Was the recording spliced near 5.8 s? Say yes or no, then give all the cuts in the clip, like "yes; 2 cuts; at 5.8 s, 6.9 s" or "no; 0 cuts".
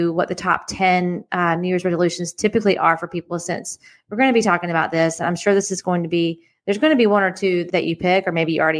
no; 1 cut; at 7.7 s